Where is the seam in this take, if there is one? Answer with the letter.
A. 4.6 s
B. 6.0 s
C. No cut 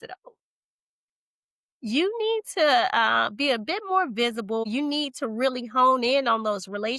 A